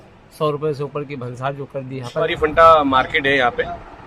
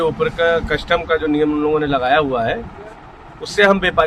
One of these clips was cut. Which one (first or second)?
first